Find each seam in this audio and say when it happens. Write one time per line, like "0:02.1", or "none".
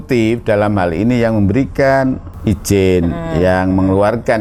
0:02.3